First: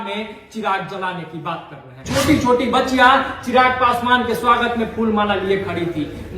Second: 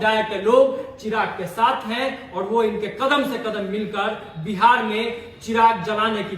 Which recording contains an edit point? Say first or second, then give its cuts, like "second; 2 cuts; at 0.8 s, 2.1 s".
first; 1 cut; at 2.0 s